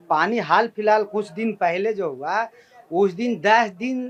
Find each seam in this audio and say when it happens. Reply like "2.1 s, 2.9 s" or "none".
none